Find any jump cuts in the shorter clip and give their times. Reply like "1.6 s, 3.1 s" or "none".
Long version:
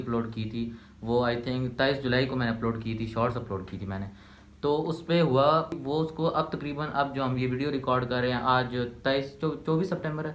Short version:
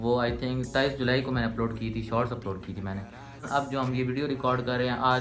3.4 s